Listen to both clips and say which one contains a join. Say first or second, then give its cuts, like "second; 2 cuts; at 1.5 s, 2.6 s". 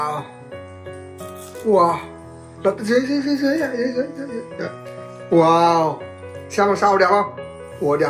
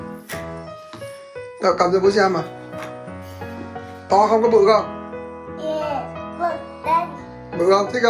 second; 1 cut; at 1.6 s